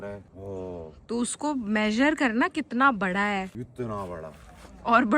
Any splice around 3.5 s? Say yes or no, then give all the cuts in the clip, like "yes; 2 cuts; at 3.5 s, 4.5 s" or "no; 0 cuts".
yes; 1 cut; at 3.5 s